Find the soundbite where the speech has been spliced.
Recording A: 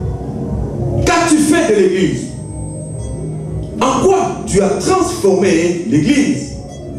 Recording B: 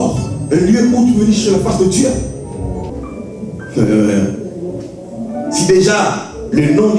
B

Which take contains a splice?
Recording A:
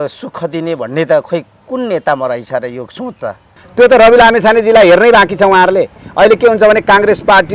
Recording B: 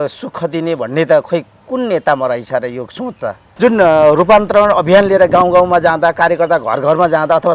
A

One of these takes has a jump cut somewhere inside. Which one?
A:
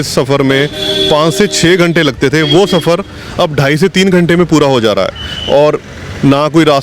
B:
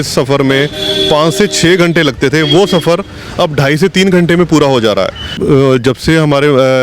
B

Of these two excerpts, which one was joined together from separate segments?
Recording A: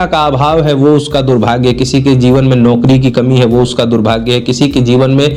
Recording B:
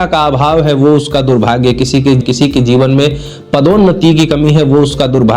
B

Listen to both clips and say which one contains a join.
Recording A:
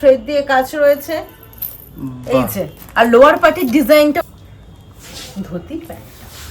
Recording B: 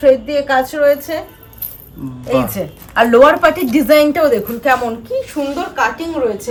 A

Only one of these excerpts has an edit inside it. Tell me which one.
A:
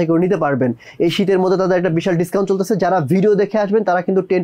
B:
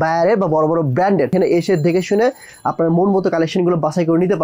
B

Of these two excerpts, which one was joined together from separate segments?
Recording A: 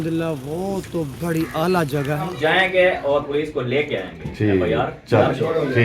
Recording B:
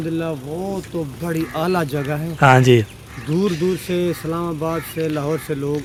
A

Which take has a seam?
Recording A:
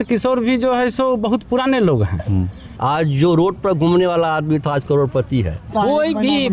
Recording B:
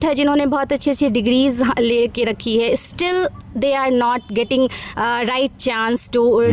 A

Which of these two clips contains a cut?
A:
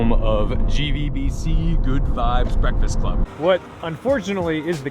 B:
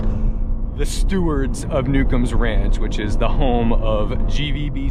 A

